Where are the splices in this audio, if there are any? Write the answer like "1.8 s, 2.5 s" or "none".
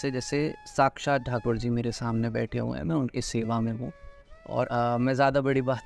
4.7 s